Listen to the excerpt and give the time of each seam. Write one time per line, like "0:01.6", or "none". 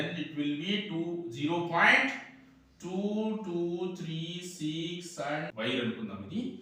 0:05.5